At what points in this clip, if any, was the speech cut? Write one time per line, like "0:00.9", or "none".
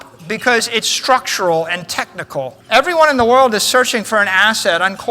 0:02.6